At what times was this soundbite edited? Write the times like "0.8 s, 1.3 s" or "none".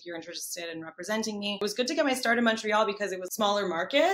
1.6 s, 3.2 s